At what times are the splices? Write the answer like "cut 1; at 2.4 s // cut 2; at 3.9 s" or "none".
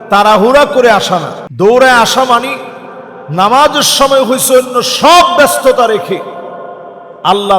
cut 1; at 1.4 s